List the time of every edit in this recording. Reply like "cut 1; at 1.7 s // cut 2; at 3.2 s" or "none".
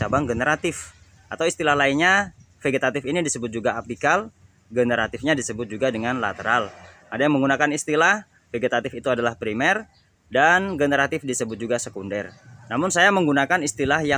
none